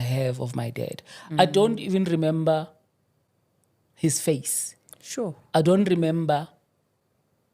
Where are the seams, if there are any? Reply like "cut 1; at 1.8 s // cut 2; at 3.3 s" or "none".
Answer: none